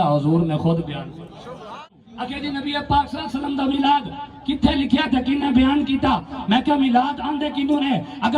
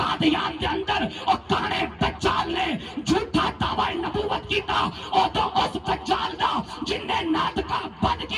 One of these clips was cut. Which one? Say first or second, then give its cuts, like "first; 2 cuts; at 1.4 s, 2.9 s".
first; 1 cut; at 1.8 s